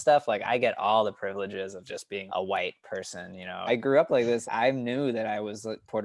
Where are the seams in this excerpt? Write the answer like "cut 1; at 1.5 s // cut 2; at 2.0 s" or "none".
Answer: cut 1; at 2.2 s // cut 2; at 3.7 s // cut 3; at 4.4 s